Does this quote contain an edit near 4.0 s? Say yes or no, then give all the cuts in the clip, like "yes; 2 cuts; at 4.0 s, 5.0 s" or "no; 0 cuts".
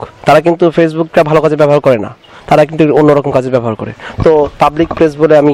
no; 0 cuts